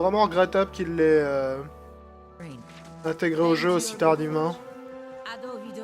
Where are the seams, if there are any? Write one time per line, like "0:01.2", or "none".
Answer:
0:01.3